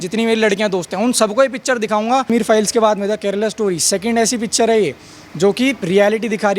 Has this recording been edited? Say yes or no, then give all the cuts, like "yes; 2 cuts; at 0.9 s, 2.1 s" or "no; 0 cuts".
yes; 1 cut; at 2.3 s